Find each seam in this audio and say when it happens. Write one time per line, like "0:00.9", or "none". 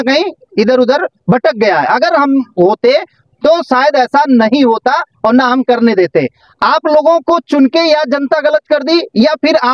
none